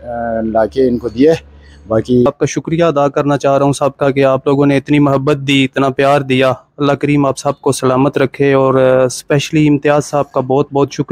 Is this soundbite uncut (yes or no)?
no